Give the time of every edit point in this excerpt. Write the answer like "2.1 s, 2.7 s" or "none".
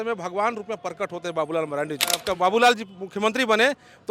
2.2 s